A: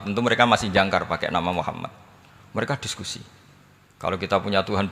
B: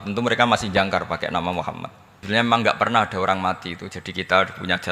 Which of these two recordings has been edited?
B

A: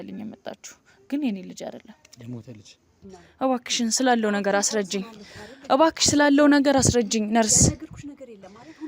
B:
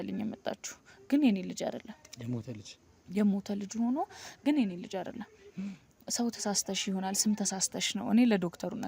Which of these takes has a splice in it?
A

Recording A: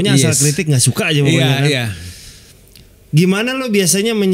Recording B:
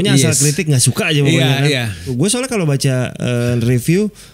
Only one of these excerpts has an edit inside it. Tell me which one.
B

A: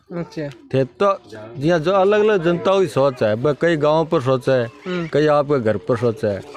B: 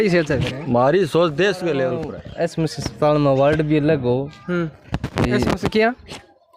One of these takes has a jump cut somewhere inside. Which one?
B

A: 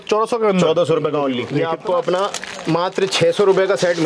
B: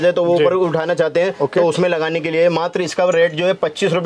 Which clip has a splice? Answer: A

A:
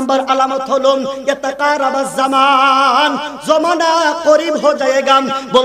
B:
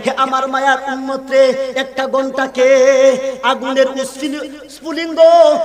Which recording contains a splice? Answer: B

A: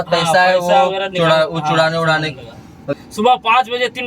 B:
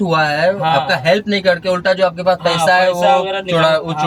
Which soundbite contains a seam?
A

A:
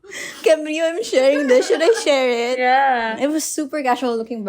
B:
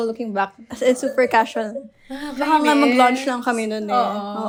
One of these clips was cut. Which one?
A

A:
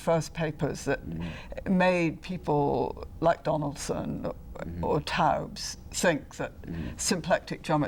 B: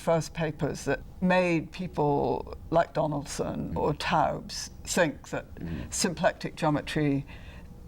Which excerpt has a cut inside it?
B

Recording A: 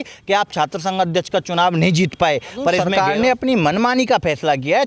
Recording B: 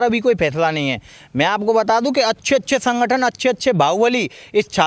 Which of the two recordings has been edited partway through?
A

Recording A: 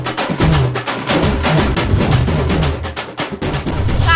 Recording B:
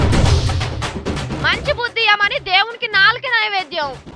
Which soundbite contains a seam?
B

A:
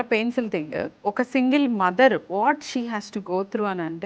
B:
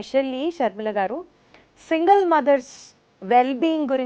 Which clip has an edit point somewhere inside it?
A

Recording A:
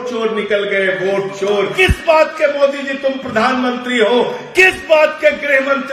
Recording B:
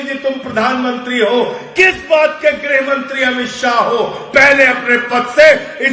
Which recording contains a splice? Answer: A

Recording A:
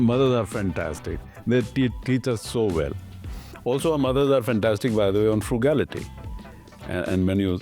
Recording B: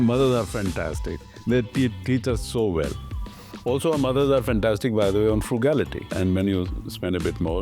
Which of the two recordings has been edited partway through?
B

